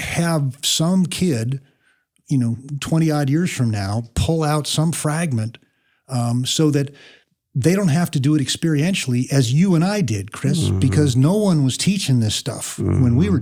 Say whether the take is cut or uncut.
uncut